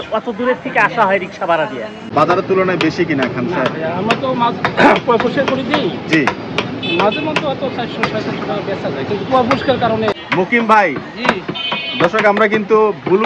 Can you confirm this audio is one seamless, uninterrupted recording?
no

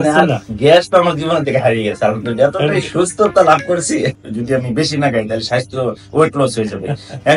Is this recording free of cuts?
no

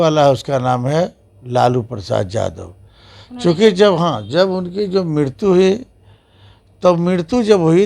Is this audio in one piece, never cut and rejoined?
yes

